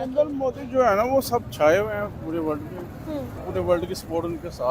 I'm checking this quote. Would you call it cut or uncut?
cut